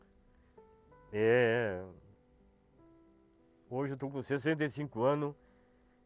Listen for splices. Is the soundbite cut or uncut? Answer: uncut